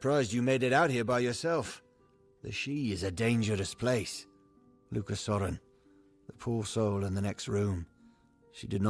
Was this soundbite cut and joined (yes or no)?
no